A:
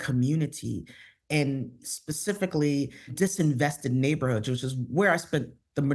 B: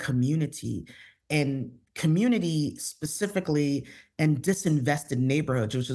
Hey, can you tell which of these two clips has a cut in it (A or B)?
A